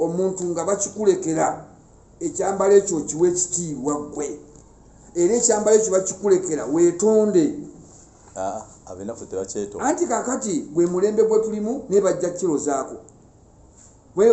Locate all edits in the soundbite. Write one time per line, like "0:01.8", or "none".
none

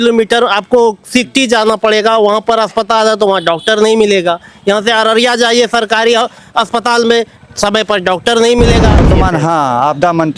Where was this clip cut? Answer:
0:09.1

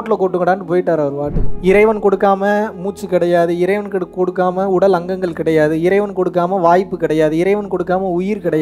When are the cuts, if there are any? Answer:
0:01.5

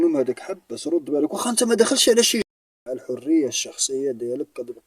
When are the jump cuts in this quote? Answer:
0:02.5

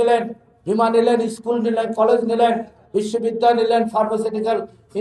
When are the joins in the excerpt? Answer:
none

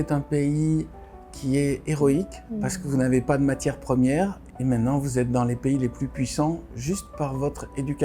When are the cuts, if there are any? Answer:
0:02.4
0:04.4

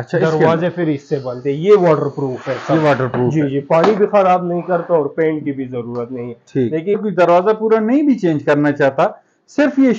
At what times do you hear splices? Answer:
0:07.0

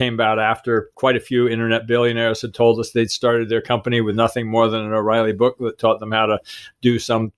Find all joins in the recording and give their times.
0:00.9

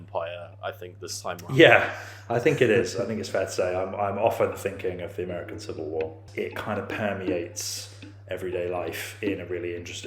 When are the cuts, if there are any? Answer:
0:06.2

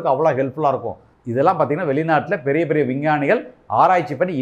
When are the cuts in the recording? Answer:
0:01.1

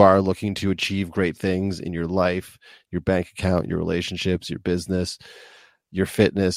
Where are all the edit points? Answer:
none

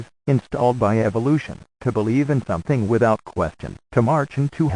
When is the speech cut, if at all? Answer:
none

